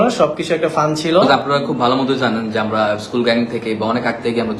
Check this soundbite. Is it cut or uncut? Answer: cut